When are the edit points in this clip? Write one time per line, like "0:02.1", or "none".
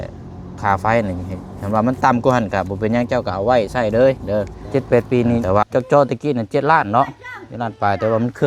0:04.6